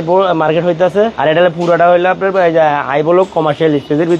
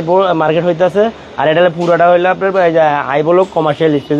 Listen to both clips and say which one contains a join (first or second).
first